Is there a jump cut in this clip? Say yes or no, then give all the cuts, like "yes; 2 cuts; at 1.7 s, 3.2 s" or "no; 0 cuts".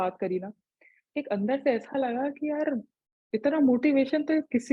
no; 0 cuts